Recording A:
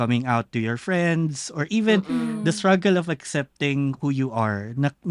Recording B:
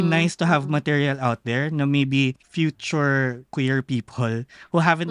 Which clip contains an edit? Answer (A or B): B